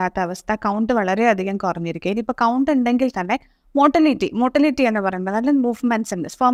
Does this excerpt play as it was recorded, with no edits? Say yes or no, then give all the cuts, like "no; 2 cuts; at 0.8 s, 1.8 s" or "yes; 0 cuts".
yes; 0 cuts